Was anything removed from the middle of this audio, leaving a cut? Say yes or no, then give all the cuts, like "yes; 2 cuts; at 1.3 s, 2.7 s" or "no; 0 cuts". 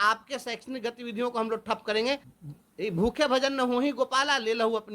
yes; 1 cut; at 2.4 s